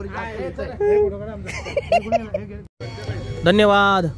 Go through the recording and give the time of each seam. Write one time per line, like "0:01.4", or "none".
none